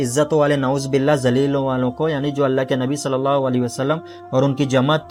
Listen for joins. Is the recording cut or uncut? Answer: uncut